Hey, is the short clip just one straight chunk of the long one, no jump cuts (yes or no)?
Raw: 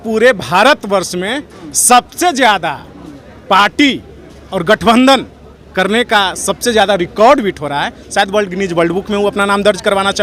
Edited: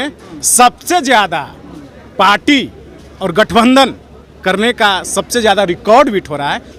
yes